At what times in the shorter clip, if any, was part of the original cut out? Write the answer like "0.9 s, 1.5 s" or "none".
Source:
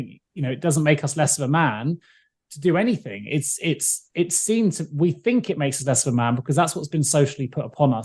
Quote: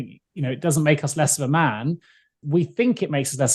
2.4 s